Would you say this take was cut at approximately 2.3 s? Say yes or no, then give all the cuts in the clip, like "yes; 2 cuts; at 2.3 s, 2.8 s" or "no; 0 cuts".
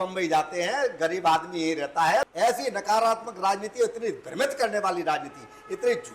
yes; 1 cut; at 2.3 s